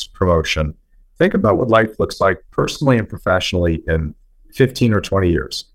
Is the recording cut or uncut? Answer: uncut